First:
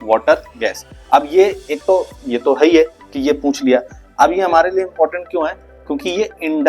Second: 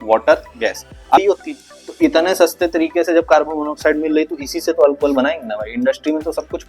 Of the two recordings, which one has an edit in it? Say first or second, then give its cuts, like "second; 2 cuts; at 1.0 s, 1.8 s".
second; 1 cut; at 1.2 s